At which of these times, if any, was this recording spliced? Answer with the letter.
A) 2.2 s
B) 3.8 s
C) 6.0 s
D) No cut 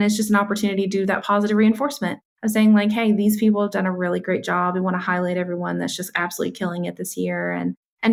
D